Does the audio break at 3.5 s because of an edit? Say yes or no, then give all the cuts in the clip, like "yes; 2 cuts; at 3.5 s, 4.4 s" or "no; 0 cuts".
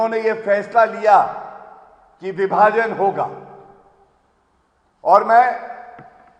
no; 0 cuts